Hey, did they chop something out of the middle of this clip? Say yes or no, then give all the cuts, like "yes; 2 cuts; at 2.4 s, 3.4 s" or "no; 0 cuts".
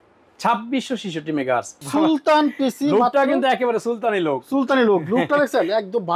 yes; 1 cut; at 1.8 s